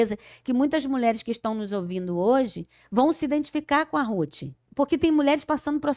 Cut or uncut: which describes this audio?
cut